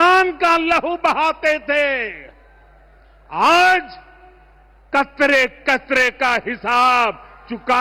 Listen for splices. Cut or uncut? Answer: uncut